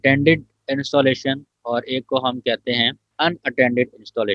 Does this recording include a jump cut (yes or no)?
yes